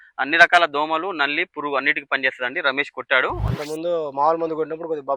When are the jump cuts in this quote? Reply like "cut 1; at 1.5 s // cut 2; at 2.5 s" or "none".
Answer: cut 1; at 3.5 s